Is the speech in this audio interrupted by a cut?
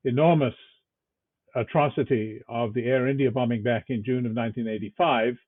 no; 0 cuts

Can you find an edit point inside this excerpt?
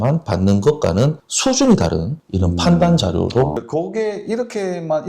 yes; 1 cut; at 3.6 s

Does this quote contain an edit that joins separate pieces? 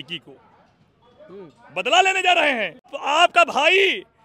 yes; 1 cut; at 3.0 s

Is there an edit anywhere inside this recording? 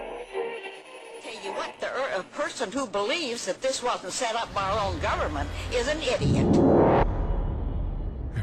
no; 0 cuts

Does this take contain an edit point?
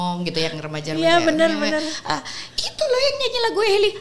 no; 0 cuts

